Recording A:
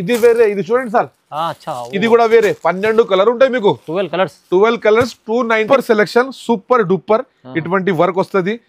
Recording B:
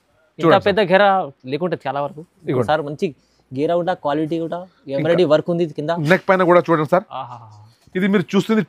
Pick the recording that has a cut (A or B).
A